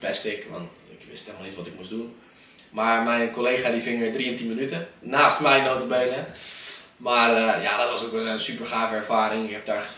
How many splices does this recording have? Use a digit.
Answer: 0